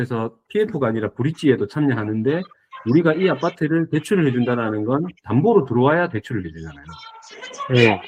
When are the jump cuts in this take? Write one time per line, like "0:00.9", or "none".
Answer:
none